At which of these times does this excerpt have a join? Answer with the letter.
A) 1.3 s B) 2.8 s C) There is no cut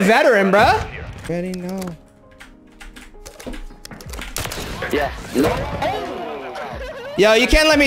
A